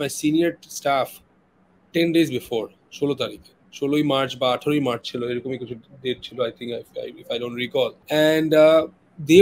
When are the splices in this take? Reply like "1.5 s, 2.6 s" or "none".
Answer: 8.0 s